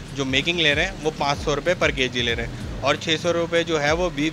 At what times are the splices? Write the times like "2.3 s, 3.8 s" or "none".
none